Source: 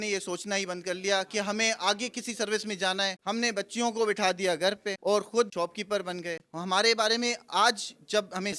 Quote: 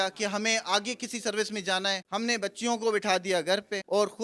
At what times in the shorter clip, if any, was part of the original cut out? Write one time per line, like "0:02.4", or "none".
none

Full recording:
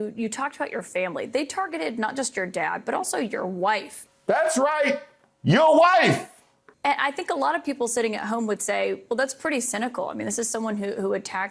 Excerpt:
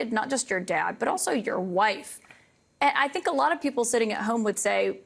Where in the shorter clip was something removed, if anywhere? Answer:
0:02.3

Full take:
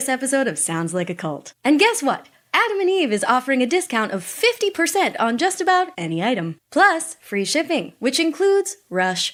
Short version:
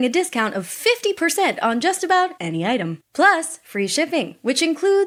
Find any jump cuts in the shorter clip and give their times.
none

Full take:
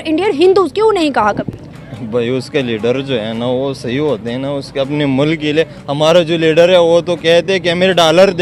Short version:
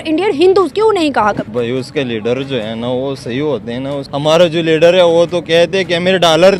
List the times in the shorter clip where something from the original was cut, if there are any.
0:01.5
0:04.0

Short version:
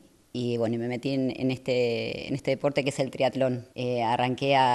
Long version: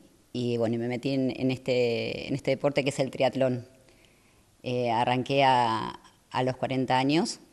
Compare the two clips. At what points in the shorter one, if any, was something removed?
0:03.7

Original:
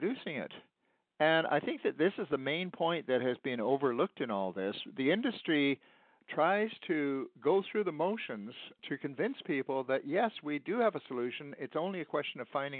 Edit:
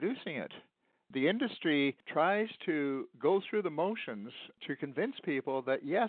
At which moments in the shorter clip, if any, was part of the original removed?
0:01.0
0:02.0

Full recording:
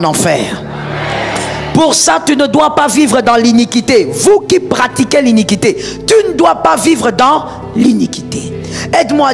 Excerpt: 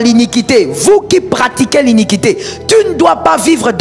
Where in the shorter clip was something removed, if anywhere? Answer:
none

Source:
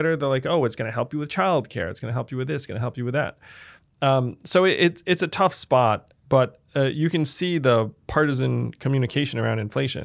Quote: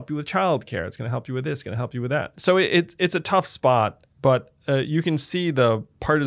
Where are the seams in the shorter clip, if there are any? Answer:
0:02.3

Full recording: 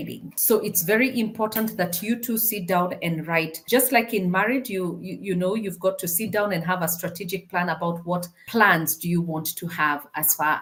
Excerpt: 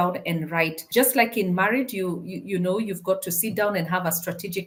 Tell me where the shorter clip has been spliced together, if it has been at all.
none

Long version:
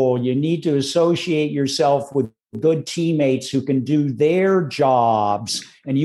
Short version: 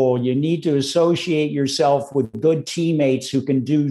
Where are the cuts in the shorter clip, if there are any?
0:02.3

